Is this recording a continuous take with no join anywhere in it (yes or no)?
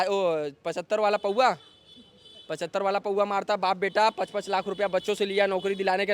yes